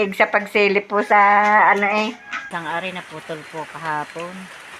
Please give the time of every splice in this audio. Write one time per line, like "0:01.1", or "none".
0:02.5